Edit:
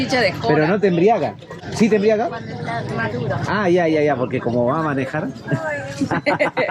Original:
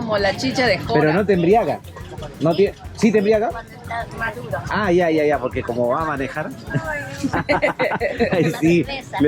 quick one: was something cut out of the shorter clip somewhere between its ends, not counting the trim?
yes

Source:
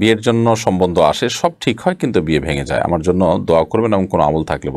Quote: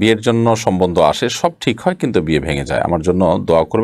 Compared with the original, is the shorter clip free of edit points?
yes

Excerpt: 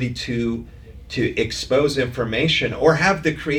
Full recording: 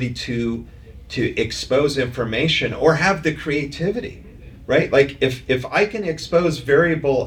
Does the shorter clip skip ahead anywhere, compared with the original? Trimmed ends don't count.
no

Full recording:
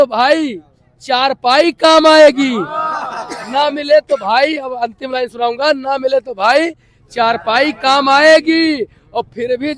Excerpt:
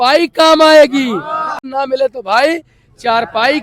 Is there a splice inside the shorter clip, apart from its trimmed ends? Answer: yes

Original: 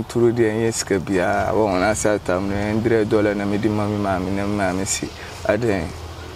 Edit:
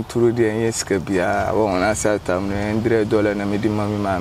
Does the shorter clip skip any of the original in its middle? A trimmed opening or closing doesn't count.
no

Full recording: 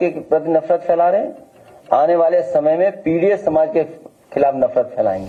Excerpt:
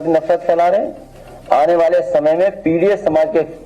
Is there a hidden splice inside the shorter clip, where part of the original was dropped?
no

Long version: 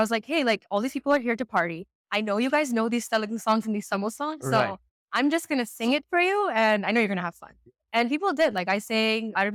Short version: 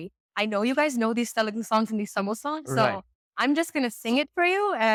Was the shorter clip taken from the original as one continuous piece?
yes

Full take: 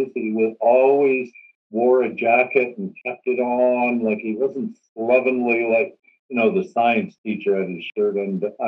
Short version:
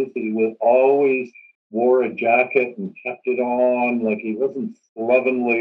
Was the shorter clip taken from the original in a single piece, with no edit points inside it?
yes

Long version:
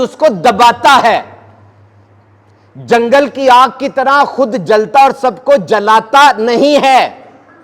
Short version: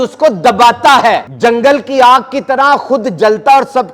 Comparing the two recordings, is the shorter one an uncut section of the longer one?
no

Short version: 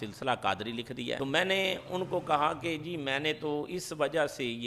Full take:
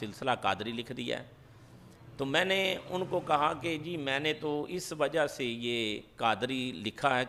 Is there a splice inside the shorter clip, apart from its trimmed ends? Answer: yes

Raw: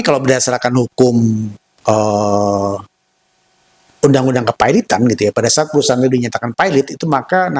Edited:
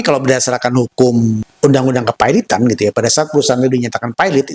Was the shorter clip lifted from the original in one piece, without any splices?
no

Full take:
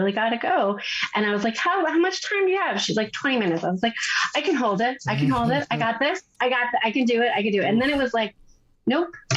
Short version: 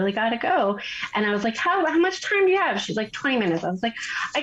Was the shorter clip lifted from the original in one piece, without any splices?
yes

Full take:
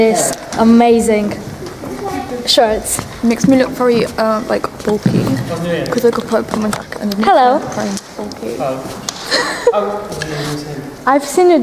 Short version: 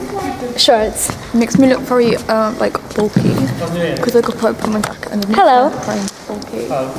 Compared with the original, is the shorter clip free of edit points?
yes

